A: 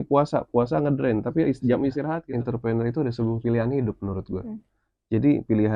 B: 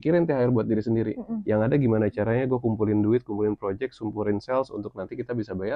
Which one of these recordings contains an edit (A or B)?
A